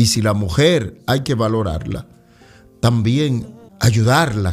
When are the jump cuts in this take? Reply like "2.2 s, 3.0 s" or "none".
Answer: 3.5 s